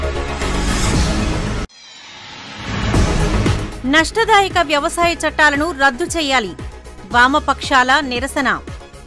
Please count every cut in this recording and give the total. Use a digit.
1